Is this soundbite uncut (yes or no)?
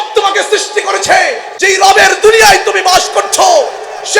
no